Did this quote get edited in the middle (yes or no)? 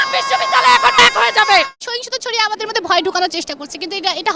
yes